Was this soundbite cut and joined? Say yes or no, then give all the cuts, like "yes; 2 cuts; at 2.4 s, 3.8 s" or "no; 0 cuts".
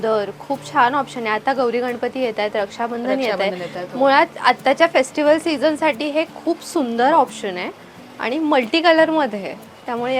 no; 0 cuts